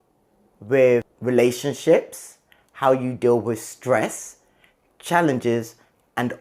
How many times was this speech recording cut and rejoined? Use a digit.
1